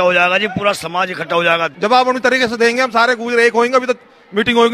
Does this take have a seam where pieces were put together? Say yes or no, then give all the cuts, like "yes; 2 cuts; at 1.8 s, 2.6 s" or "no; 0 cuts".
yes; 1 cut; at 1.7 s